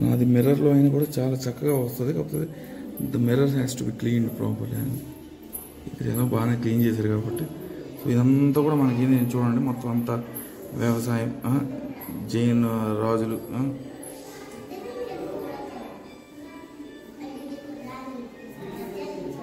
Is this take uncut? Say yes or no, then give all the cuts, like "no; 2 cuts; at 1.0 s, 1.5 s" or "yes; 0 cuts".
yes; 0 cuts